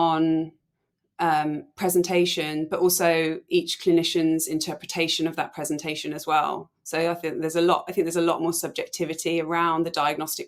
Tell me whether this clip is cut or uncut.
uncut